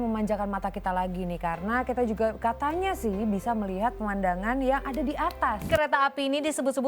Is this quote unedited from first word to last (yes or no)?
no